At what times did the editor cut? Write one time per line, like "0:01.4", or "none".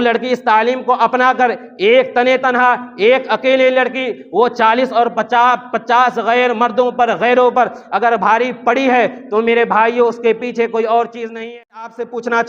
0:11.4